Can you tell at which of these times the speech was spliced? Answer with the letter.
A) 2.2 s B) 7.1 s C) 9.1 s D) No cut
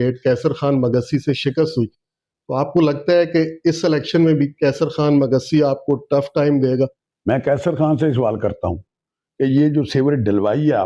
B